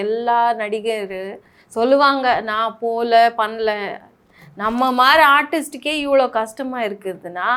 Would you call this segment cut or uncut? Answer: uncut